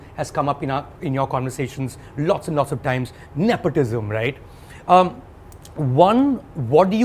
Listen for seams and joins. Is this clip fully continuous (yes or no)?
yes